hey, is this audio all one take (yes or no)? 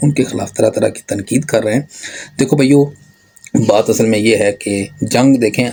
yes